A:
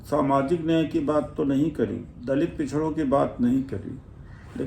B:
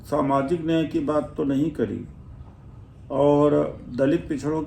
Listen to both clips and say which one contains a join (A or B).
A